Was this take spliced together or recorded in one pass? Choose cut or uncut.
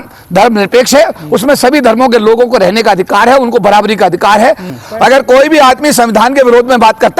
cut